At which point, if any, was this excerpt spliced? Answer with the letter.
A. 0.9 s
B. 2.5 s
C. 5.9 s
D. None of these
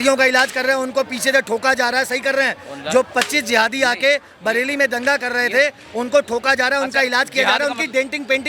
D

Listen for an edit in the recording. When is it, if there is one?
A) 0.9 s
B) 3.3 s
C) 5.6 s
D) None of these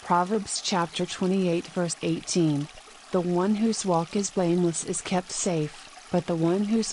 A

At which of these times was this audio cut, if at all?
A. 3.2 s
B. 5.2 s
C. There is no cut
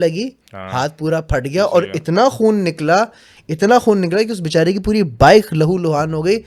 C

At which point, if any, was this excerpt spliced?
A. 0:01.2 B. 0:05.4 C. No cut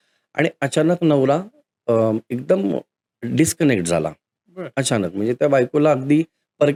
C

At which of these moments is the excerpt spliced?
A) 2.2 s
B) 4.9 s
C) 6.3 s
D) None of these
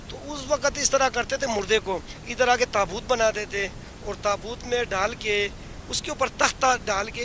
D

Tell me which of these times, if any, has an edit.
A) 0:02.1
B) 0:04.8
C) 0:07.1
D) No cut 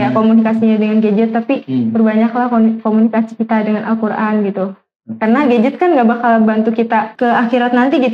C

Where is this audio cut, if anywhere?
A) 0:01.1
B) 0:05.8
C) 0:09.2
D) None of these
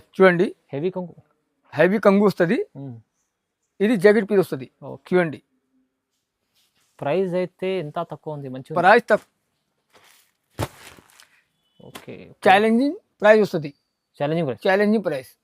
C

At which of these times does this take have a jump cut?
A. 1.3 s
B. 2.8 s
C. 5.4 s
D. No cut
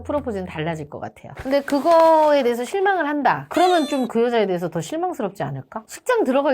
A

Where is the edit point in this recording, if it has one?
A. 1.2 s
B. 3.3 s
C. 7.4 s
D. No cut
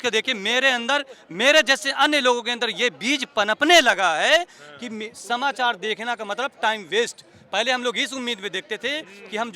D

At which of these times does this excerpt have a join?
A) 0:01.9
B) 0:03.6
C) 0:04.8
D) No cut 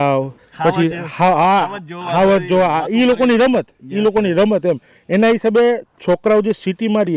D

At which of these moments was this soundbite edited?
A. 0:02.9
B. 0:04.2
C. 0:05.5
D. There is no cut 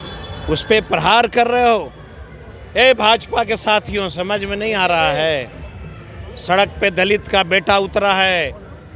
D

